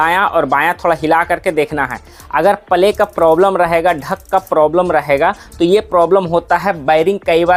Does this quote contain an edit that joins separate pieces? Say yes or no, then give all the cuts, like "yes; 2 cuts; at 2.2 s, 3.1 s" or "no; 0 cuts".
no; 0 cuts